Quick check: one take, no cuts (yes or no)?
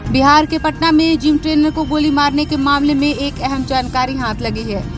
yes